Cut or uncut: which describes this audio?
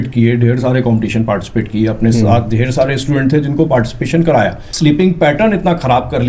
cut